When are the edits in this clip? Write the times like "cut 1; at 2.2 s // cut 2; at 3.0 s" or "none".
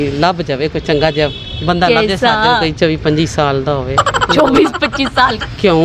none